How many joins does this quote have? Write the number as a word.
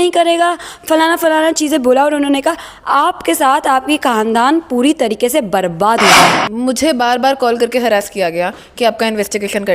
one